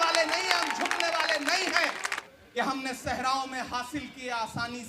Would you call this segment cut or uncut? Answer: cut